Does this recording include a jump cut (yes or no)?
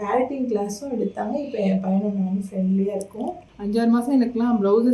yes